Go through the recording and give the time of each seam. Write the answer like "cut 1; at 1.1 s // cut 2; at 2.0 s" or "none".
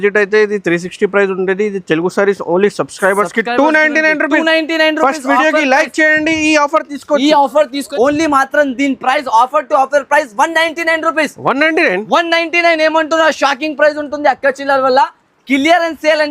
cut 1; at 7.8 s